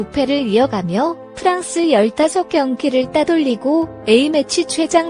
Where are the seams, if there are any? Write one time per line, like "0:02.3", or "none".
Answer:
none